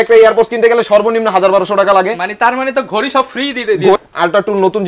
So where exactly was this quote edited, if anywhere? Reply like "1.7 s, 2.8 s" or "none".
3.9 s